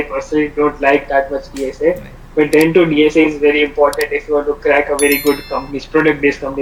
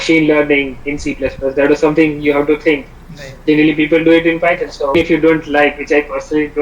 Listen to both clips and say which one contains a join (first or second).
second